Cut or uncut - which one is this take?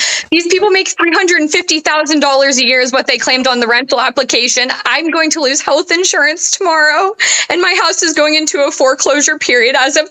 uncut